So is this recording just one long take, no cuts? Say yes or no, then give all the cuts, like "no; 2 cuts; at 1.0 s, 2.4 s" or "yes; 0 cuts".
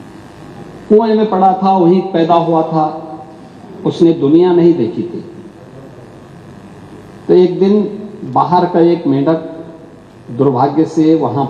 yes; 0 cuts